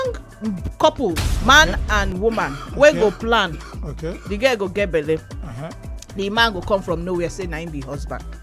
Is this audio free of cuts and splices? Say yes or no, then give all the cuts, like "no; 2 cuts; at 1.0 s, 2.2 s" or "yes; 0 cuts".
no; 1 cut; at 1.3 s